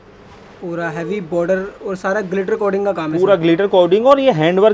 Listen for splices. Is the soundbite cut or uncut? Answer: uncut